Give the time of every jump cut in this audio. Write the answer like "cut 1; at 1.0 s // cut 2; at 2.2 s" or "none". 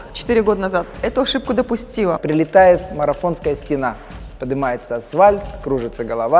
cut 1; at 2.2 s

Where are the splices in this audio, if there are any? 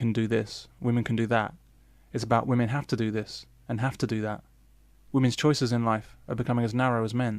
cut 1; at 1.3 s

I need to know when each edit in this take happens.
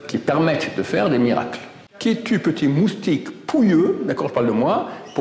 cut 1; at 1.8 s

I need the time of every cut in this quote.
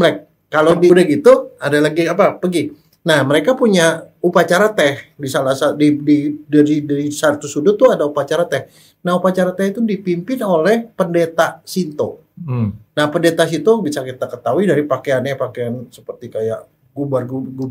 cut 1; at 0.9 s

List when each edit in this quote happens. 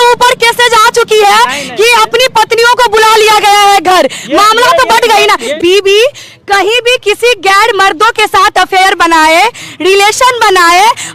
cut 1; at 5.5 s

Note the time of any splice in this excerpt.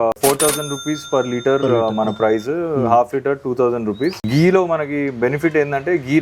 cut 1; at 4.2 s

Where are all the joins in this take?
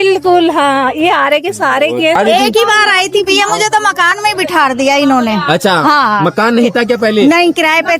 cut 1; at 2.2 s

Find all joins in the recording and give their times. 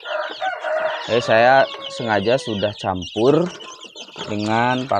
none

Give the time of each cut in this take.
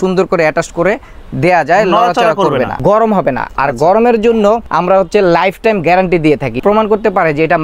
cut 1; at 2.7 s // cut 2; at 4.7 s // cut 3; at 6.6 s

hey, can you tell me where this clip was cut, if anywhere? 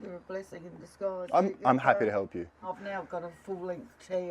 cut 1; at 2.7 s

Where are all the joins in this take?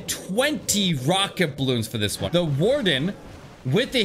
cut 1; at 2.2 s

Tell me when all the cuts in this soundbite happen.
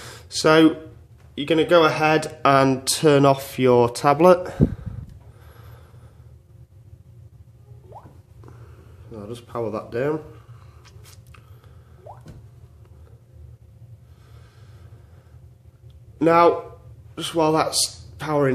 cut 1; at 16.1 s

